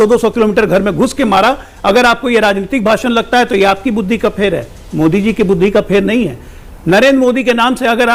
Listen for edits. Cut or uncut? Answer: uncut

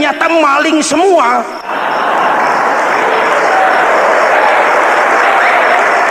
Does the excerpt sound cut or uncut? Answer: cut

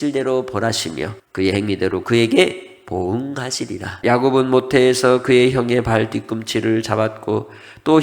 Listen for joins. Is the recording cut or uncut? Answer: cut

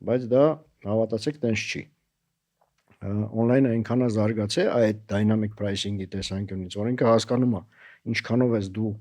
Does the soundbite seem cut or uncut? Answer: uncut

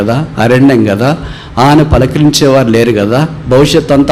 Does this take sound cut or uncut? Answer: uncut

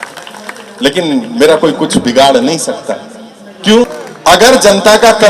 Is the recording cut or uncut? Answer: cut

